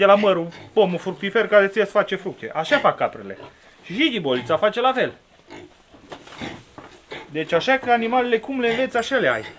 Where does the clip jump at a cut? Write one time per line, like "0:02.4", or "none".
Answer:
none